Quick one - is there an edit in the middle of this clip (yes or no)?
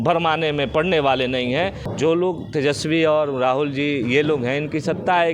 yes